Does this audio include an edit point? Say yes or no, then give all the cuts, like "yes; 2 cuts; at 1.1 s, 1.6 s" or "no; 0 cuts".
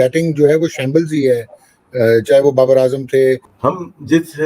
yes; 1 cut; at 3.5 s